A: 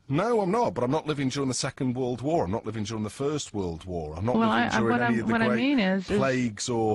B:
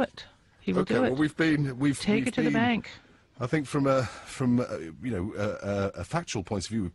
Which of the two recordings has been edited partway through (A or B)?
A